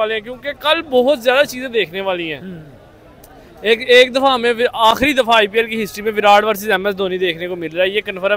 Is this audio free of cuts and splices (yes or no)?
yes